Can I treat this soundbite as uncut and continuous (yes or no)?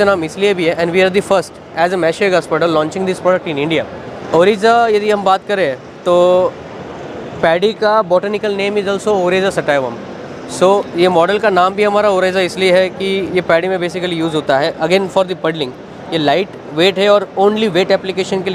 yes